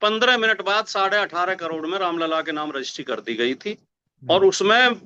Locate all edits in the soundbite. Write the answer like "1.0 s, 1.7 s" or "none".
none